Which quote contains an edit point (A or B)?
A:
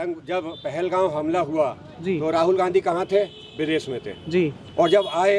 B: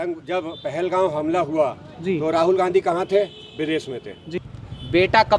B